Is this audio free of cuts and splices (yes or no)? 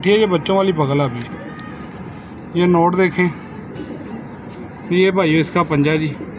yes